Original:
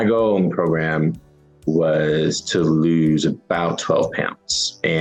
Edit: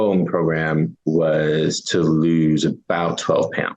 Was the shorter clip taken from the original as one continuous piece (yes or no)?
no